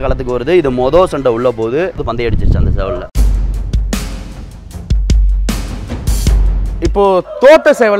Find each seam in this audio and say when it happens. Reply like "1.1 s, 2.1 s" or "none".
2.0 s, 3.1 s, 6.8 s

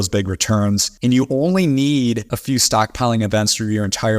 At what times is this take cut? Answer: 0.9 s, 2.3 s

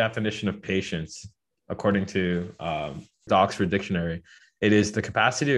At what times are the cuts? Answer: 3.2 s

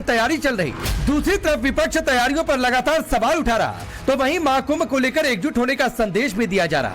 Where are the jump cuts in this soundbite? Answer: 1.6 s

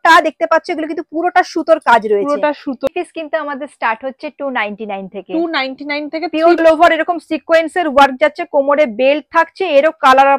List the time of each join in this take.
2.9 s, 6.6 s

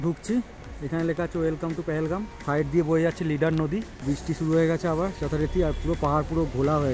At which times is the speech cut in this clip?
2.4 s, 4.0 s

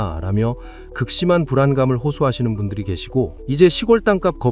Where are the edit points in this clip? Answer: 3.4 s

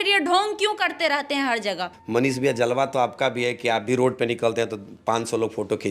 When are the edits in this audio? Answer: 1.9 s

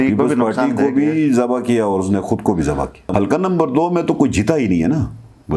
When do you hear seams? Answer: 2.9 s

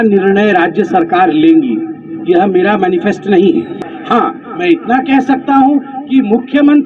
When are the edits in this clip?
3.9 s

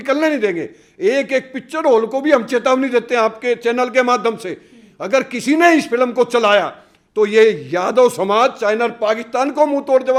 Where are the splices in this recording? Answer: none

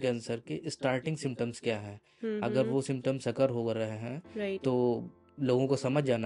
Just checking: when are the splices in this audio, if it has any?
none

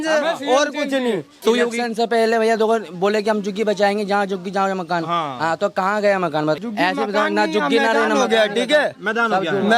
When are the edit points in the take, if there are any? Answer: 1.4 s, 6.6 s

